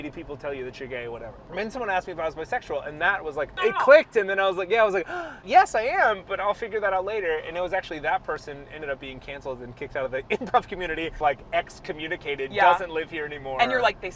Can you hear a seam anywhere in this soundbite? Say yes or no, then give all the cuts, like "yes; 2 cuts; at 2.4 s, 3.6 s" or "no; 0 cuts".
yes; 4 cuts; at 1.4 s, 3.9 s, 5.5 s, 11.1 s